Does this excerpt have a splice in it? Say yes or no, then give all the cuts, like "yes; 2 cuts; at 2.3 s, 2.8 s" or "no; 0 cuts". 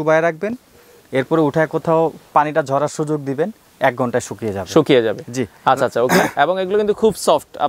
no; 0 cuts